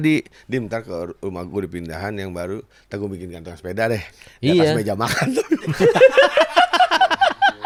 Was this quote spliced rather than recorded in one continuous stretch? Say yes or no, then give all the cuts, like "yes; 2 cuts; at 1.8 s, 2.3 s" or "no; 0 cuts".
no; 0 cuts